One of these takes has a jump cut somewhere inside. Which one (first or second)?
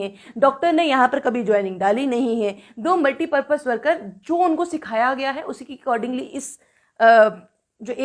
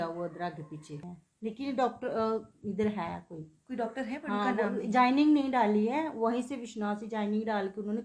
second